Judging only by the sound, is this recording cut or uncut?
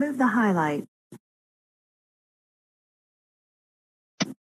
uncut